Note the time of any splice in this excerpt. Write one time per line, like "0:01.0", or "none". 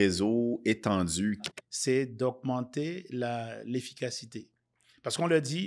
0:01.4